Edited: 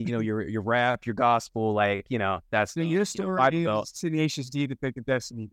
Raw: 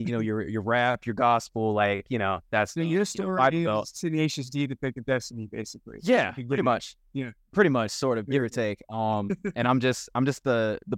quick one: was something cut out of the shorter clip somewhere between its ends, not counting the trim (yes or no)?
no